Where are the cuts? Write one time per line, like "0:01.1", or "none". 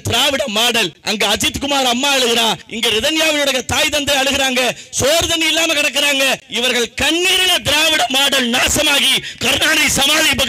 0:01.0
0:02.7
0:06.5